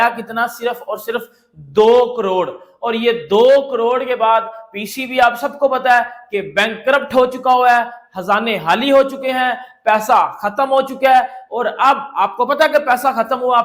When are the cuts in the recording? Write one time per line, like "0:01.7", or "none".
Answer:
none